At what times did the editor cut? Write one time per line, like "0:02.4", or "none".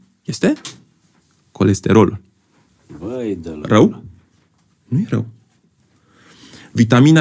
none